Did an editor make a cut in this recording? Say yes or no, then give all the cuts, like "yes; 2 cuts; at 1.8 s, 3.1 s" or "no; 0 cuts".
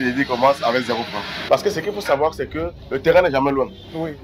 yes; 1 cut; at 1.5 s